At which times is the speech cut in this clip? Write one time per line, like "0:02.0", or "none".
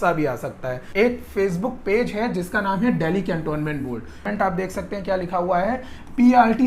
0:00.9
0:04.3